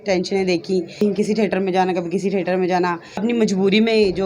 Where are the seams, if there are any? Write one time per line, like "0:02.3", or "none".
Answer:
0:01.0
0:03.2